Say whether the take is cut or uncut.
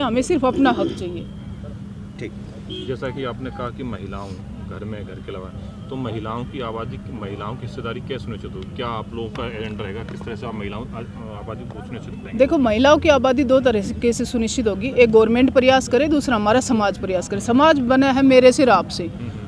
uncut